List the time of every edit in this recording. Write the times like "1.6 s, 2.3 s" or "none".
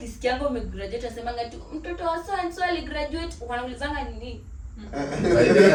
none